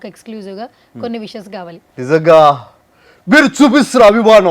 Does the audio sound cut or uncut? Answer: cut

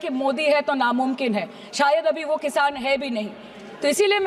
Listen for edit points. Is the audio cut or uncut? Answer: uncut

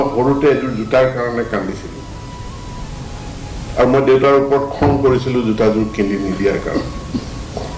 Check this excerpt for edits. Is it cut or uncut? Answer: uncut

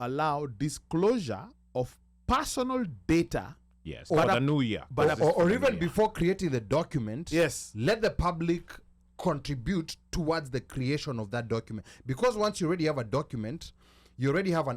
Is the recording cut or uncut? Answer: cut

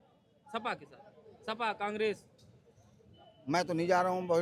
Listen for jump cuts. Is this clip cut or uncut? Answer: uncut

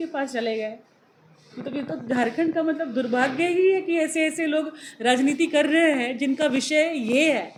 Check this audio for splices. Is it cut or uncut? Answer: uncut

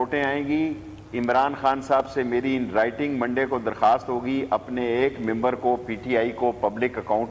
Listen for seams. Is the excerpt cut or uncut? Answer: uncut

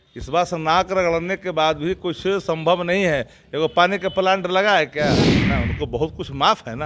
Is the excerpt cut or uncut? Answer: cut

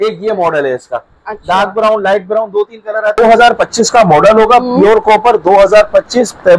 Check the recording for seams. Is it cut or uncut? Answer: cut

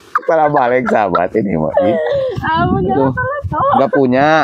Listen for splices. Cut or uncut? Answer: uncut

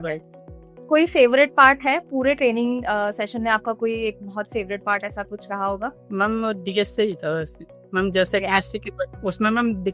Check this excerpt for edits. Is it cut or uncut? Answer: uncut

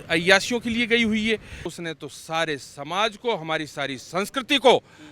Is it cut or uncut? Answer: cut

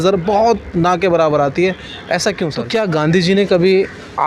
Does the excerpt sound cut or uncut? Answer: cut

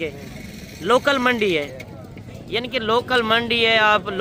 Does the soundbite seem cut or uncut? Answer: uncut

